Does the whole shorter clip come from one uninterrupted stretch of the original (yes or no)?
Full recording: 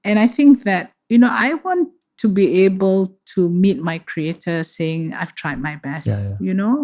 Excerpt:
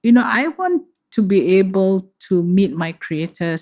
yes